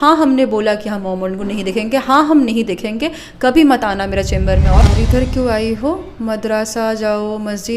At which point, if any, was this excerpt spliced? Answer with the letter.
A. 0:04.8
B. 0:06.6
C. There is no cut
A